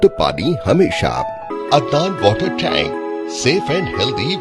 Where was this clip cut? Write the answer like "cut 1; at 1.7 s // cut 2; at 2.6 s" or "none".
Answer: cut 1; at 1.5 s